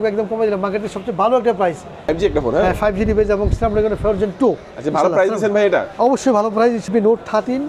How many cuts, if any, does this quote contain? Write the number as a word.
two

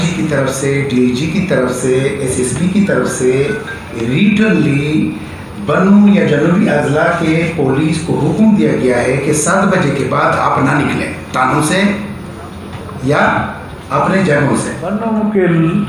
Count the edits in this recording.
one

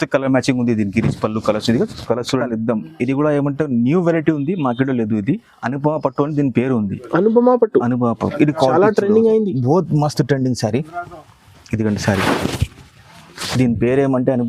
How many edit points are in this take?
one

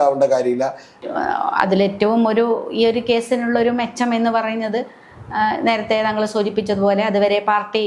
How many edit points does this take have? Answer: one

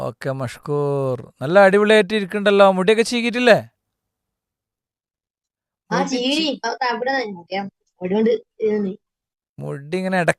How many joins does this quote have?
zero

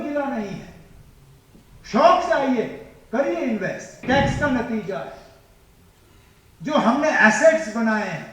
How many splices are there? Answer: one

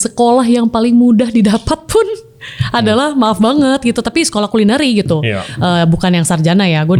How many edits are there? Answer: zero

